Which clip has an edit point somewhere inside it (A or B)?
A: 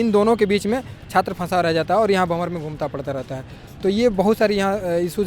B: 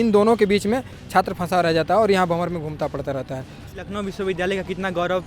B